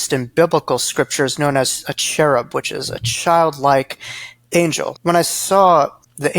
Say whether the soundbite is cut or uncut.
cut